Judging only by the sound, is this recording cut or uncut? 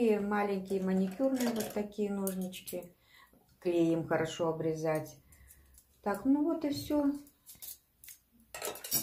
uncut